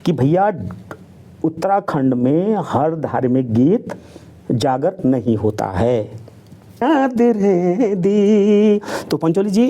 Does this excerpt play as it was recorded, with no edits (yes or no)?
no